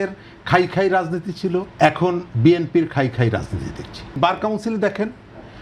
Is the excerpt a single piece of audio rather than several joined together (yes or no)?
no